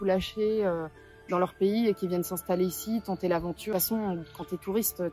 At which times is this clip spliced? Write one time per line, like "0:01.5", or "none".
0:03.7